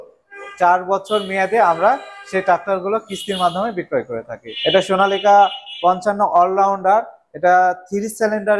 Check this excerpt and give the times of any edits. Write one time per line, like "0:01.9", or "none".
0:04.5